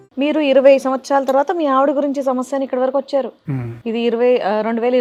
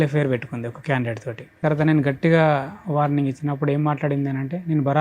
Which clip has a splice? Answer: second; 1 cut; at 1.6 s

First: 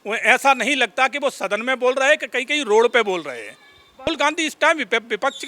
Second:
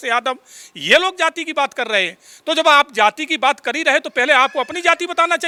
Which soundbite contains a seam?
first; 1 cut; at 4.1 s

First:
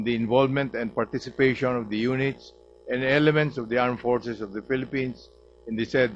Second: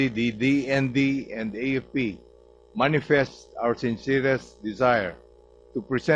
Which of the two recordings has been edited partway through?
first; 1 cut; at 2.1 s

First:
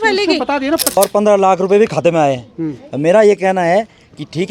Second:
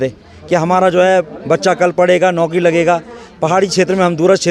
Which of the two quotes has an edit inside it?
first; 1 cut; at 1.0 s

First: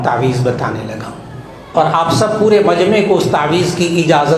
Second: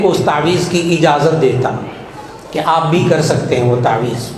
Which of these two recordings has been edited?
first; 1 cut; at 1.7 s

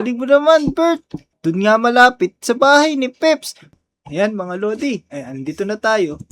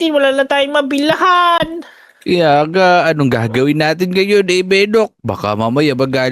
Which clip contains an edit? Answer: first; 1 cut; at 3.8 s

